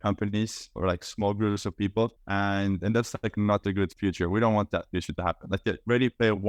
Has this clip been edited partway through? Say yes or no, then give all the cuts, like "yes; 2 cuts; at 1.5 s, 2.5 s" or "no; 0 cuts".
no; 0 cuts